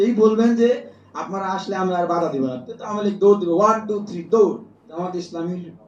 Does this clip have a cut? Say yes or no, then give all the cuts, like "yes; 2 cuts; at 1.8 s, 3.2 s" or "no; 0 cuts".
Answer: yes; 1 cut; at 4.8 s